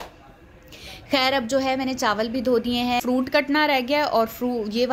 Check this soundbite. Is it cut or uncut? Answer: cut